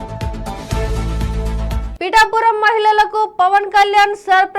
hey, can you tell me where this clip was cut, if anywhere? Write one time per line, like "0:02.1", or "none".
0:01.9